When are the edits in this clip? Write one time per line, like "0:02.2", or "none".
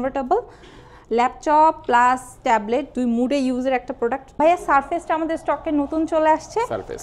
0:04.3